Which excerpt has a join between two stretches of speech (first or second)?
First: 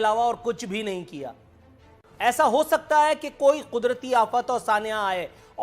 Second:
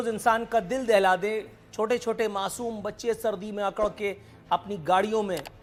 first